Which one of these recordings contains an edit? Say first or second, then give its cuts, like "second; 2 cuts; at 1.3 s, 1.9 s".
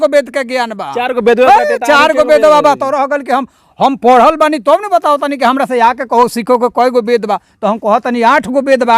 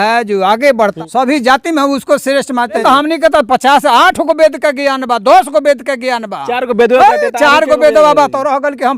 second; 2 cuts; at 1.0 s, 2.8 s